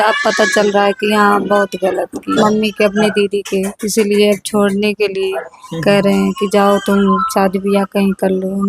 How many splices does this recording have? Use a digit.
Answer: 1